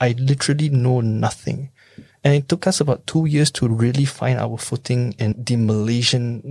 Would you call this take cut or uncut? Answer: cut